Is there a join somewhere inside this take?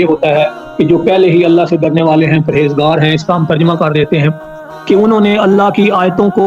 yes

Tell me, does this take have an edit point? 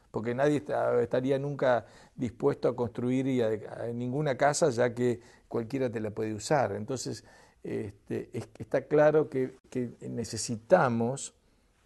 no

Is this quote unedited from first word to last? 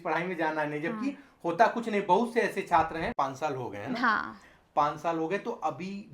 no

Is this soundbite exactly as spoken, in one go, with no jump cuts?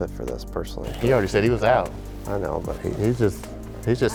yes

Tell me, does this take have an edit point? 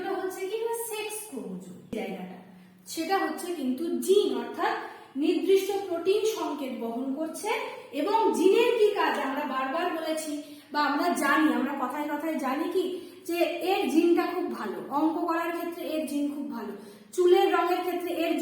yes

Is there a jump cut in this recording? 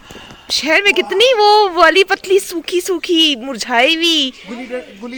no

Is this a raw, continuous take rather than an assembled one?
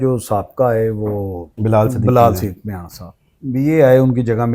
yes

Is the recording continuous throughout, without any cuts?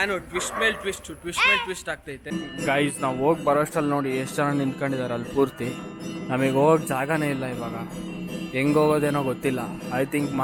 yes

